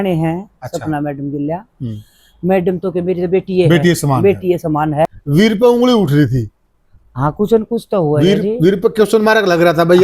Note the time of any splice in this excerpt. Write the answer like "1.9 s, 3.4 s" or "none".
5.2 s